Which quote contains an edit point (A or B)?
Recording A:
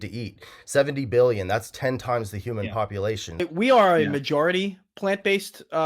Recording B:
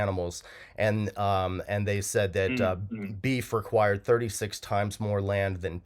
A